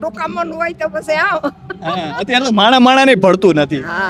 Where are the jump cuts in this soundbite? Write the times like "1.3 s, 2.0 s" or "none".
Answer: none